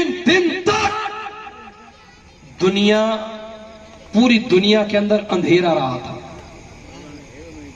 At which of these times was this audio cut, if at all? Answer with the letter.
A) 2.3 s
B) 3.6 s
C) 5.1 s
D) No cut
D